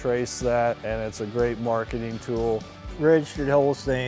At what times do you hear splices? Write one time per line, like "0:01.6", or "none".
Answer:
0:00.8
0:02.7